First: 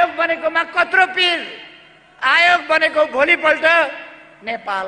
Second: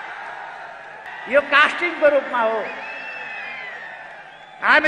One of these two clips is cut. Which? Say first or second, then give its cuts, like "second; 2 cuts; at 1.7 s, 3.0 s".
second; 1 cut; at 1.1 s